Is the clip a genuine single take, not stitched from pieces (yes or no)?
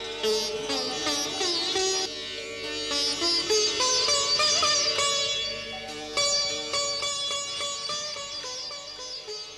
no